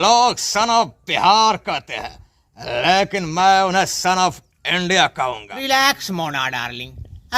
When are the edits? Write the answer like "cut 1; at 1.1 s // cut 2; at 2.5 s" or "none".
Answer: cut 1; at 5.5 s